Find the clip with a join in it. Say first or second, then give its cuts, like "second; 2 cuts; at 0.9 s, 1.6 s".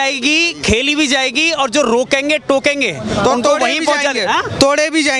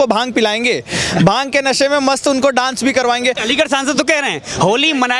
second; 1 cut; at 3.4 s